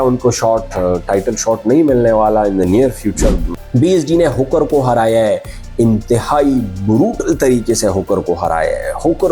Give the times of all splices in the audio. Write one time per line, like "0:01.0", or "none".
0:03.5